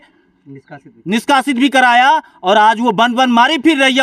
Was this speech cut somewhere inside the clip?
no; 0 cuts

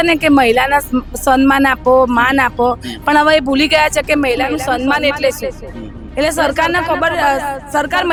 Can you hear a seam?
no; 0 cuts

